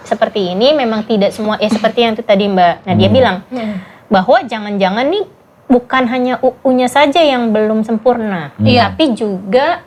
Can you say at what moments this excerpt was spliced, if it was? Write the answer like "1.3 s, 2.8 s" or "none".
none